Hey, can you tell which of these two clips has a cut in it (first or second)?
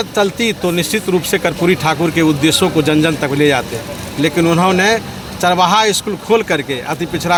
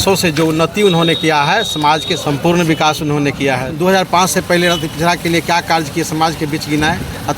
second